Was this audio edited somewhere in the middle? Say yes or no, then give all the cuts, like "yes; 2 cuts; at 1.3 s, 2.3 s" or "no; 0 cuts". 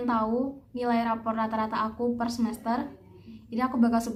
no; 0 cuts